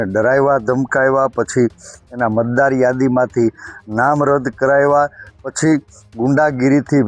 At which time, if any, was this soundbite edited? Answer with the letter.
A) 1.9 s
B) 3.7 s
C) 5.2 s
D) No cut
D